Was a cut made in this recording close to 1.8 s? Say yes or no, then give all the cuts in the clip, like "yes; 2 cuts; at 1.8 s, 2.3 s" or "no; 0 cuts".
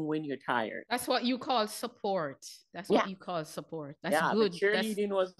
no; 0 cuts